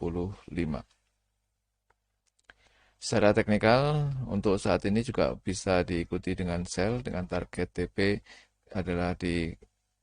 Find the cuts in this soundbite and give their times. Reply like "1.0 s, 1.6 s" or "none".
none